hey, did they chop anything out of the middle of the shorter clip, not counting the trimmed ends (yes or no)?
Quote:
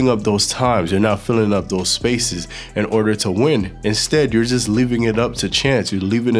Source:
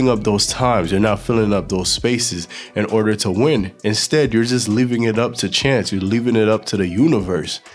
no